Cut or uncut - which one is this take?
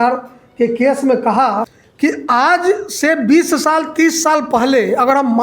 cut